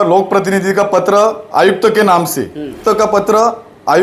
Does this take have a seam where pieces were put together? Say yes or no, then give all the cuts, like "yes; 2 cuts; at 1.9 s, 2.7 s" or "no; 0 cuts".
yes; 1 cut; at 2.8 s